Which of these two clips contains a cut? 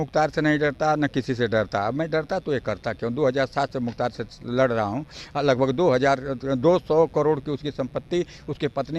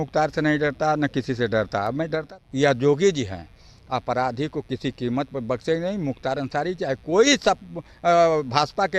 second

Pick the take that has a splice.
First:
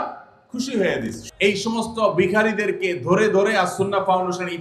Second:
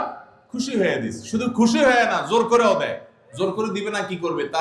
first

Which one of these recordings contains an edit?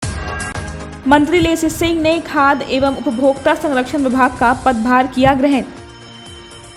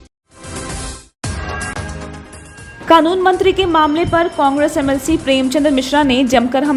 first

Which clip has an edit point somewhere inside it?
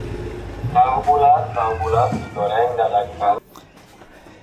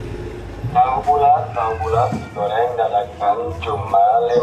first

